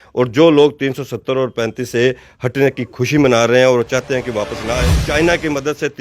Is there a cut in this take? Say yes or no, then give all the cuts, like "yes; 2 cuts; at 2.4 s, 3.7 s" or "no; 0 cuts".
yes; 1 cut; at 4.7 s